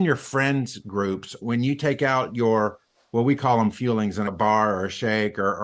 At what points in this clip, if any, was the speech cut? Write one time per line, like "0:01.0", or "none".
0:01.4
0:04.3